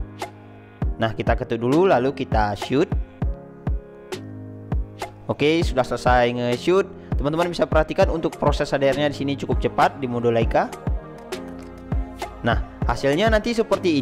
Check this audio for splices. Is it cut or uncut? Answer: uncut